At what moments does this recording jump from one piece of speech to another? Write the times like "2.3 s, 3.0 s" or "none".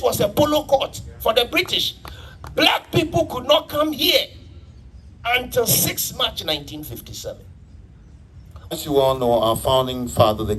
8.7 s